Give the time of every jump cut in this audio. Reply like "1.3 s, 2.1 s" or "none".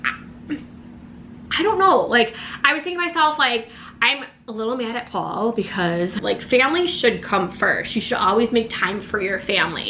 6.2 s